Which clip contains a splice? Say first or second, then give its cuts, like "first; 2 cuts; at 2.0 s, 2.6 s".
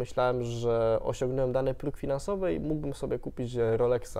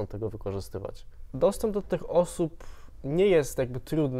second; 1 cut; at 1.3 s